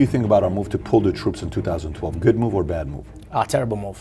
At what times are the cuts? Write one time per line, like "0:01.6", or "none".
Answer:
none